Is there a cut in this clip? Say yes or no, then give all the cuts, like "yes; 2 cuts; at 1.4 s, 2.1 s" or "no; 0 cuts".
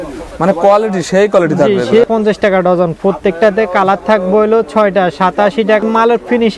yes; 2 cuts; at 2.1 s, 5.8 s